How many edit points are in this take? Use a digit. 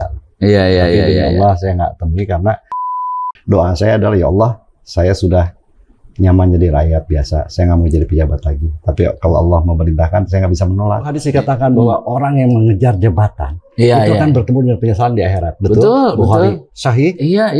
2